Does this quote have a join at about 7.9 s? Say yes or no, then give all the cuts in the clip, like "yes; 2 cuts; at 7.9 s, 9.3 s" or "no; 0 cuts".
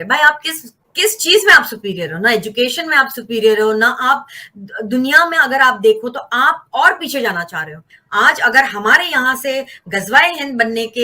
yes; 1 cut; at 7.9 s